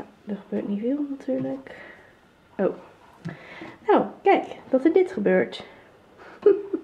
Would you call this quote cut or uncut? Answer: uncut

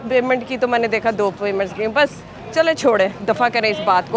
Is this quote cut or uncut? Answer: uncut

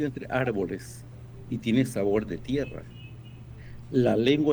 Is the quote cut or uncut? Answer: uncut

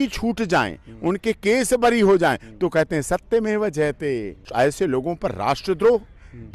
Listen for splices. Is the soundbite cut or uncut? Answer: cut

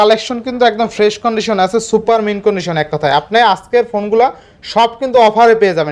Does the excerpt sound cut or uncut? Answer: uncut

